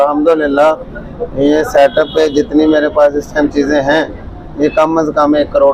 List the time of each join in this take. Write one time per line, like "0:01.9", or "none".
none